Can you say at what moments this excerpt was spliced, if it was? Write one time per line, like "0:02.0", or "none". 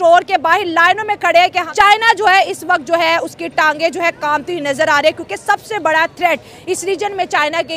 0:01.6

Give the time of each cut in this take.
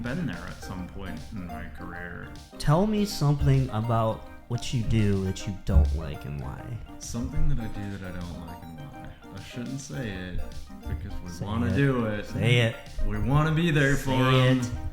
0:02.6
0:09.3

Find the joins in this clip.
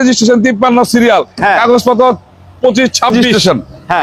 0:03.1

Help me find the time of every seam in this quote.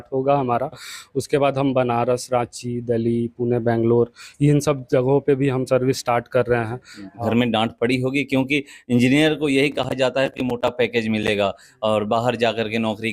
0:07.2

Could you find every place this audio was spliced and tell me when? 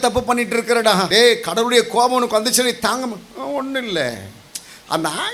0:01.1

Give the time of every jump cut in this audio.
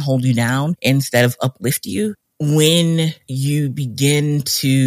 0:02.2

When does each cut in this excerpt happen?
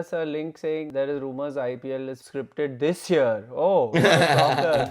0:00.9
0:02.2

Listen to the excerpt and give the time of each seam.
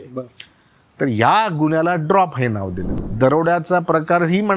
0:02.8

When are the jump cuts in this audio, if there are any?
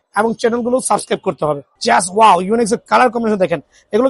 0:01.7

